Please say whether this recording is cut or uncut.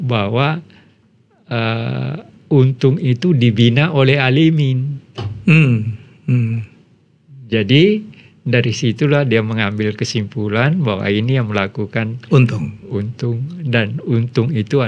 uncut